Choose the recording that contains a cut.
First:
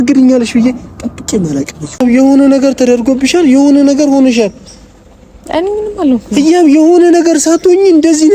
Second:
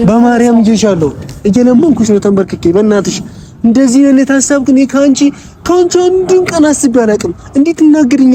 first; 1 cut; at 2.0 s

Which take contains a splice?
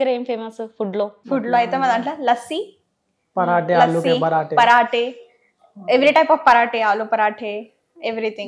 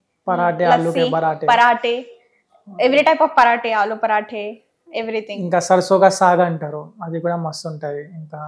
first; 1 cut; at 1.2 s

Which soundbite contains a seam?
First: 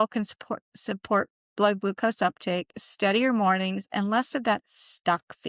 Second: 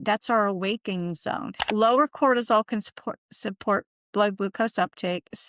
second; 1 cut; at 1.6 s

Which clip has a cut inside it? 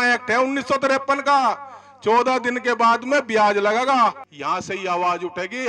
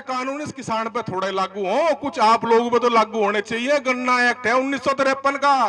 first; 1 cut; at 4.3 s

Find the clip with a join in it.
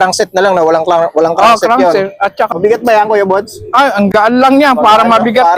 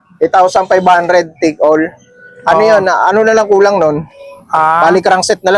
first; 1 cut; at 2.5 s

